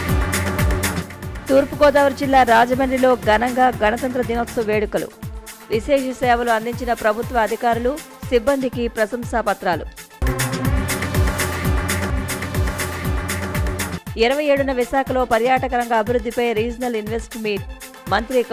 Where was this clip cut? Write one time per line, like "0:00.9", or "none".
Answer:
0:01.0